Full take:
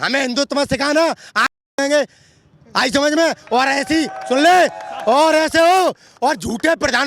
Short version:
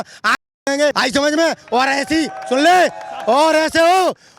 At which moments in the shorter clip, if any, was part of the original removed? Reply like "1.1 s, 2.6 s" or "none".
1.0 s

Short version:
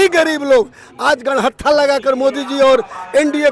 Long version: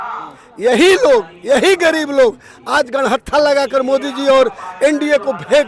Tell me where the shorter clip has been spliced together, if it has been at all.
none

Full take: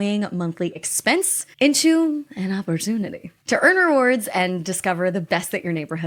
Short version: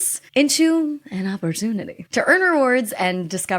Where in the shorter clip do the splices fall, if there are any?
2.0 s

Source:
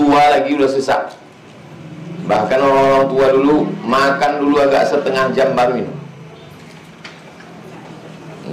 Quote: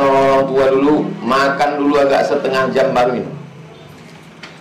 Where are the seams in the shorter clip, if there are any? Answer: none

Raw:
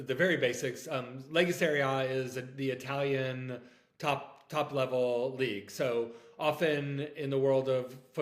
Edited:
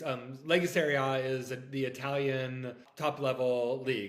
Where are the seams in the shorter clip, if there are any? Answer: 2.8 s

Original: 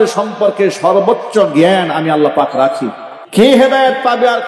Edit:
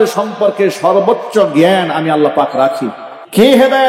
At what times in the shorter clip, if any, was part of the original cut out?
none

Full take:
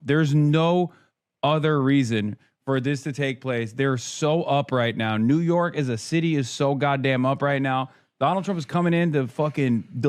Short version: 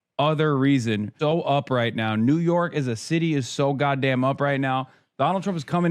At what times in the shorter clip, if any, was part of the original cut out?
1.1 s

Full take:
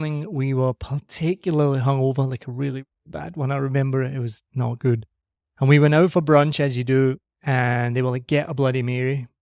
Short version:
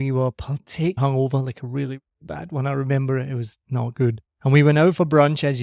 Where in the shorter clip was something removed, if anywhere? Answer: 1.0 s, 4.3 s

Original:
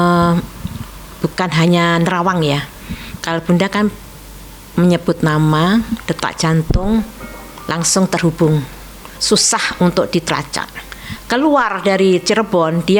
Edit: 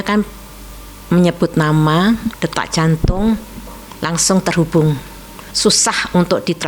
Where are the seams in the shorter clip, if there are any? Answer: none

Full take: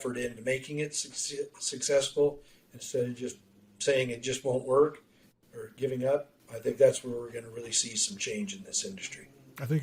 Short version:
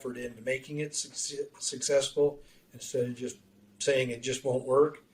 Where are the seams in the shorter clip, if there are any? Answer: none

